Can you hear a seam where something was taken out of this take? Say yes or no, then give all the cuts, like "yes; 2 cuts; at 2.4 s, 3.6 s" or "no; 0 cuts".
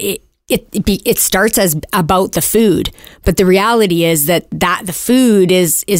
no; 0 cuts